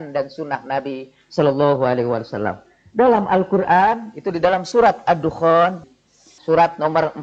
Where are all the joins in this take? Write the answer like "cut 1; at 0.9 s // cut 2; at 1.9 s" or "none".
cut 1; at 6.3 s